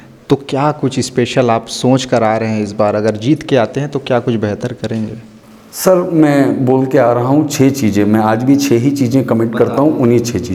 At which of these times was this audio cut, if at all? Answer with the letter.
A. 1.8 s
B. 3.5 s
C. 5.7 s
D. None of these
D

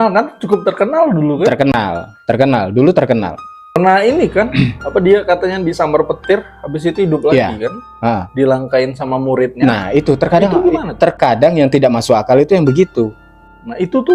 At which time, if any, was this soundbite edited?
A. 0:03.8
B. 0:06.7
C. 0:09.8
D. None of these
A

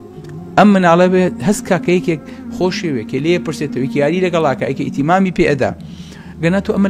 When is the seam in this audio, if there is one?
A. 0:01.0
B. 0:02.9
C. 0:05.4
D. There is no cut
D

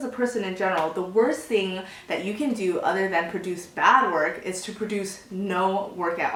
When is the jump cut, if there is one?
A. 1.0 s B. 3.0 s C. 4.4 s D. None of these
D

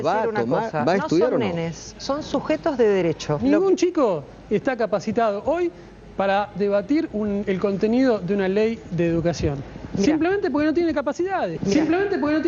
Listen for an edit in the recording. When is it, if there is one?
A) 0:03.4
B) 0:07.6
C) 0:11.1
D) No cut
A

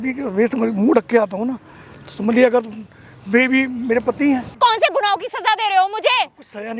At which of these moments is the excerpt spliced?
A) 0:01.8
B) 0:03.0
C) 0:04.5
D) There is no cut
C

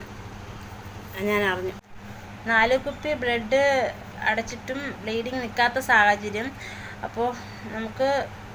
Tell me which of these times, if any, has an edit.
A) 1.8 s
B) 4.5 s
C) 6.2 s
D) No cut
A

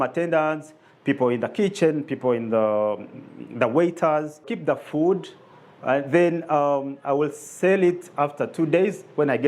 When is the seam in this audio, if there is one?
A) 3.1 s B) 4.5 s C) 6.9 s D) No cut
B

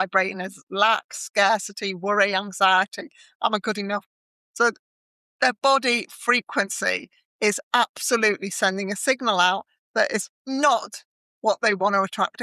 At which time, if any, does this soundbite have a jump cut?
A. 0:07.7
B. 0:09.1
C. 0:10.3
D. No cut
C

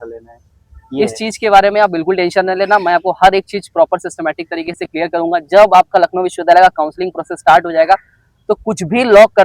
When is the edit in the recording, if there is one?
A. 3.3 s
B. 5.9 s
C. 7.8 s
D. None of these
D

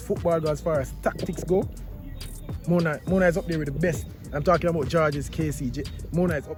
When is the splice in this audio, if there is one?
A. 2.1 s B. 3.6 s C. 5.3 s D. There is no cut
D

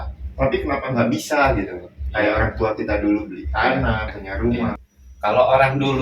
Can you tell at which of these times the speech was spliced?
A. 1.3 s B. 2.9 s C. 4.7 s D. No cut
C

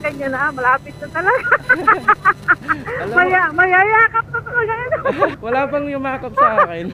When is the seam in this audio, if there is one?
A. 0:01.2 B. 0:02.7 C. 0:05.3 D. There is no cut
C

